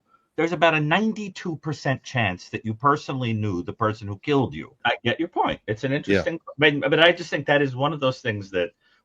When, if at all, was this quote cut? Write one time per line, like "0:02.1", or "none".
0:04.8